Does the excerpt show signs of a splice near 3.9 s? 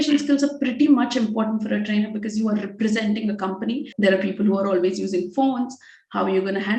yes; 1 cut; at 3.9 s

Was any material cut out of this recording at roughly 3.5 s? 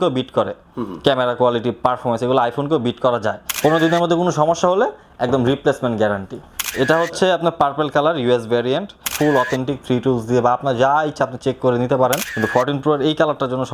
yes; 4 cuts; at 3.5 s, 6.6 s, 9.0 s, 12.3 s

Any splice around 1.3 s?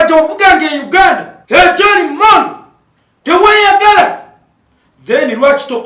yes; 1 cut; at 1.3 s

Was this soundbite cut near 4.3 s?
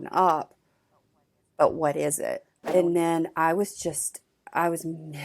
no; 1 cut; at 2.5 s

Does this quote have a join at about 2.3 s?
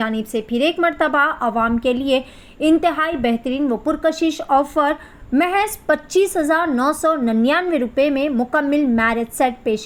no; 0 cuts

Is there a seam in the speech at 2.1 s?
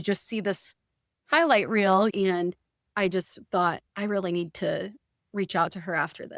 yes; 1 cut; at 2.1 s

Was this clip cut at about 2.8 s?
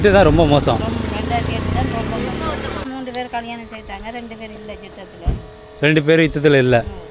yes; 1 cut; at 2.8 s

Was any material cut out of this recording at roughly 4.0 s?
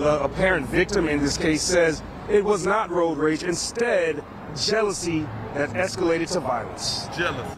no; 0 cuts

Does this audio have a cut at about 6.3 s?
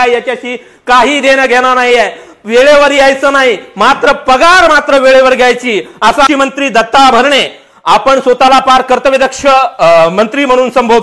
yes; 1 cut; at 6.3 s

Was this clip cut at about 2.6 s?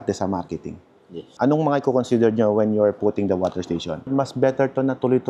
no; 2 cuts; at 1.3 s, 4.1 s

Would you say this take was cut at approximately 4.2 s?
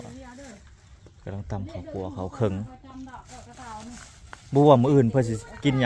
no; 0 cuts

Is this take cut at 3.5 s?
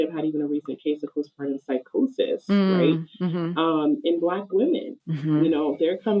no; 0 cuts

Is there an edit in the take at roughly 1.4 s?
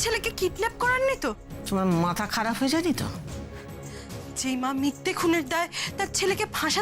yes; 1 cut; at 1.4 s

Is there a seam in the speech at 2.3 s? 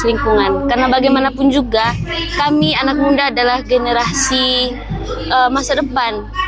no; 0 cuts

